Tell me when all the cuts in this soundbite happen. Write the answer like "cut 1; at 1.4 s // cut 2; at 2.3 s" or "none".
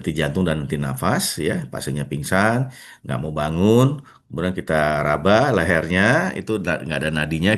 none

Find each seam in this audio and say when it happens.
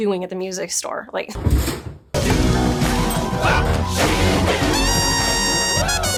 none

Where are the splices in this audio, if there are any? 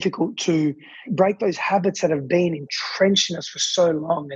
cut 1; at 1.0 s

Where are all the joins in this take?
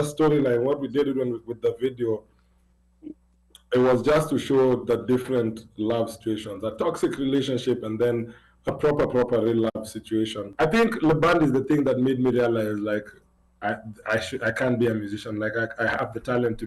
cut 1; at 10.4 s

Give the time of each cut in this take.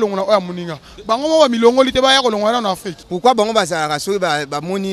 cut 1; at 2.9 s

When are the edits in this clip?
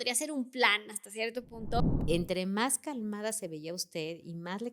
cut 1; at 1.8 s

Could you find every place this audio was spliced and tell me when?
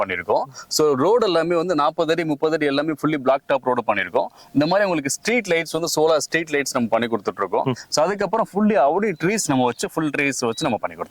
none

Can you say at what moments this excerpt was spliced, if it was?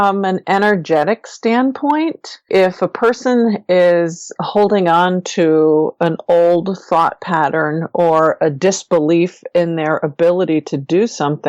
cut 1; at 2.5 s

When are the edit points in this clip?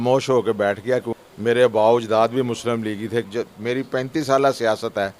cut 1; at 1.1 s // cut 2; at 3.3 s

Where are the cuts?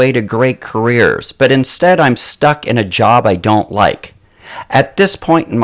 cut 1; at 4.3 s

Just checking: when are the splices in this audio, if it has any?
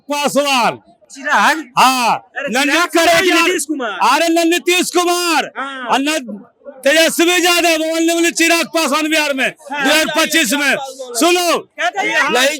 none

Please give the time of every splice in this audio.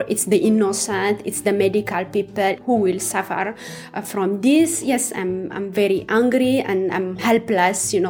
cut 1; at 2.6 s // cut 2; at 7.2 s

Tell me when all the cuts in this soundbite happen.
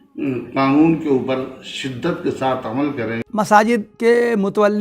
cut 1; at 3.2 s // cut 2; at 3.9 s

